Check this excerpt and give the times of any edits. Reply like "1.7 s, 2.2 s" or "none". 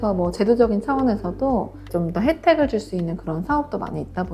none